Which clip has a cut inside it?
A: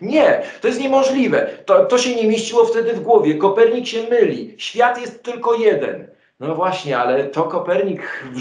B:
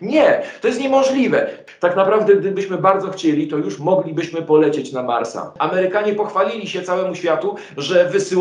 B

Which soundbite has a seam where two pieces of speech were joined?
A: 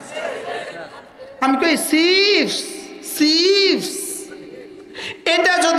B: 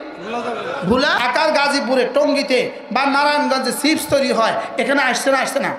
B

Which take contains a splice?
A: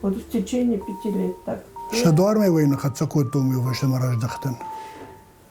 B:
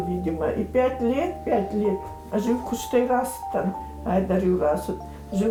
A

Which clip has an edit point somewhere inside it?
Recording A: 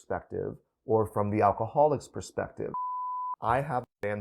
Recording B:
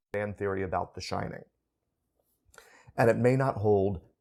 A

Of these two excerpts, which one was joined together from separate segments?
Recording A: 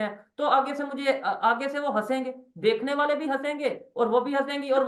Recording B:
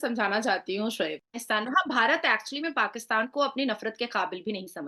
B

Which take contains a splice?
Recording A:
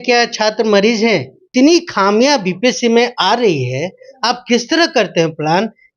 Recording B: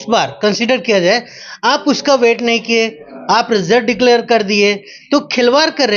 A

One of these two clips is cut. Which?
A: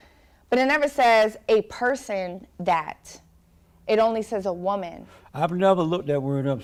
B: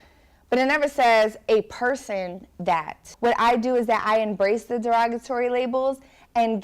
B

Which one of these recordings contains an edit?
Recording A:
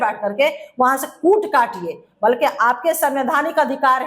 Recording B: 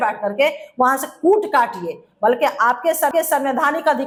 A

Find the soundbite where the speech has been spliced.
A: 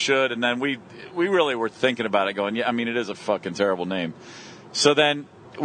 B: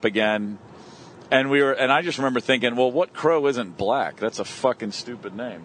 B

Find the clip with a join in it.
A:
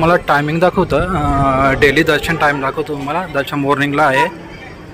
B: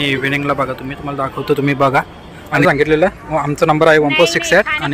B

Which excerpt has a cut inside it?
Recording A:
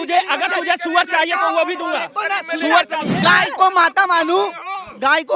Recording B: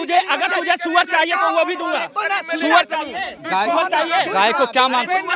A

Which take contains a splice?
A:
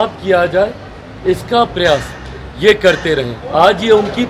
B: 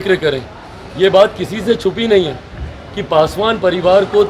A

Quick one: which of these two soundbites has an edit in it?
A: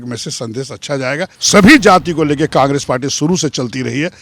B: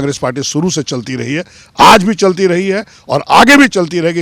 A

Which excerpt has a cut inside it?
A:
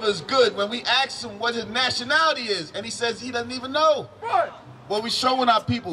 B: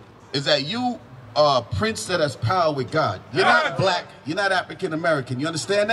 A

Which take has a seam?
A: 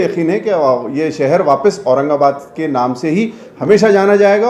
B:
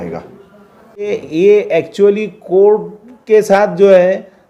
B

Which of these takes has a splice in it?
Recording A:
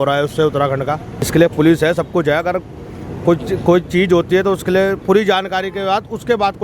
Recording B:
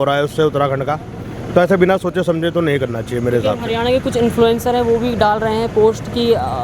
A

